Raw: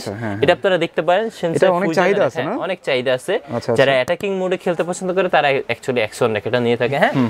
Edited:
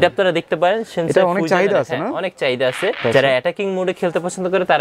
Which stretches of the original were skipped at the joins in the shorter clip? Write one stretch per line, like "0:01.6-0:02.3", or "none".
0:03.4-0:03.6